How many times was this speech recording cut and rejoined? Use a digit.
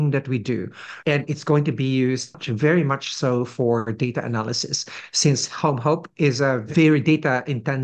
3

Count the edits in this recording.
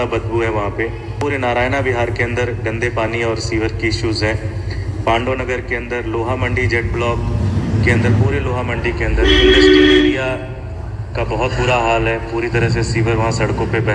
0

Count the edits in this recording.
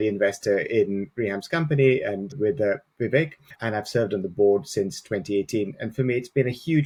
0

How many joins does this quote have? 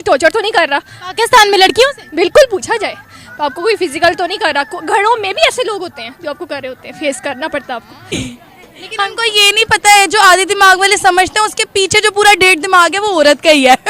1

